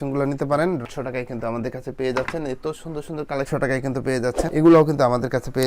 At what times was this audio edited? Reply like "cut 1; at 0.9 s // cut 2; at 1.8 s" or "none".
cut 1; at 0.8 s // cut 2; at 4.4 s